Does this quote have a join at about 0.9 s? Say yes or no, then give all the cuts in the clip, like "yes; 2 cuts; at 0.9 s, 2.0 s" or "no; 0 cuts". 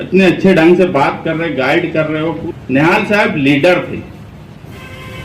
no; 1 cut; at 2.4 s